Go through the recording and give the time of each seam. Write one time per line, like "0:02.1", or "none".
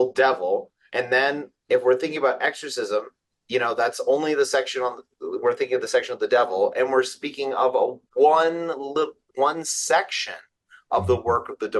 none